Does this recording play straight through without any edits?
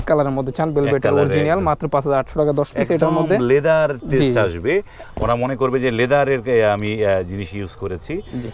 yes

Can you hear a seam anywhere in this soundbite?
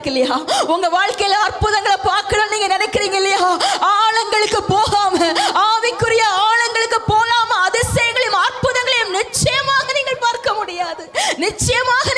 no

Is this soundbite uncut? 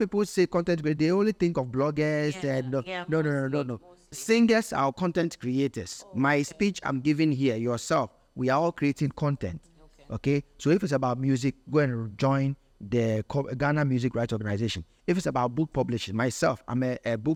yes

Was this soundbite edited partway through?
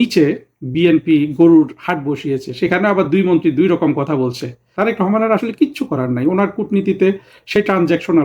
yes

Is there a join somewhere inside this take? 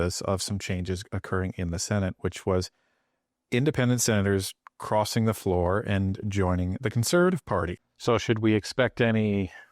yes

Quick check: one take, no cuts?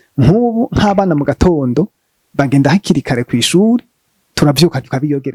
yes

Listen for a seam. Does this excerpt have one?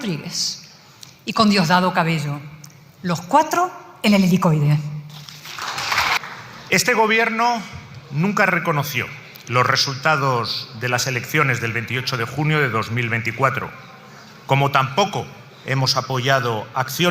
yes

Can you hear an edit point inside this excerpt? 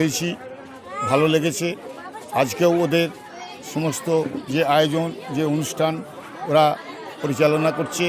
no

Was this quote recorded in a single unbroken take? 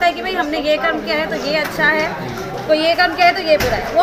yes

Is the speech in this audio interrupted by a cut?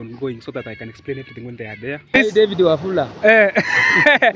yes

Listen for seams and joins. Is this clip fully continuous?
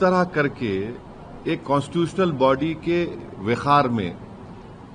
yes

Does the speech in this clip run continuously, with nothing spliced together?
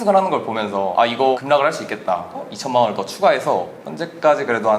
no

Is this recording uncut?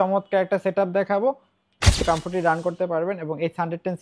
no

